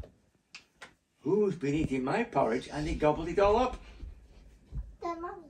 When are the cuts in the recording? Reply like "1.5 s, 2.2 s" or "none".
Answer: none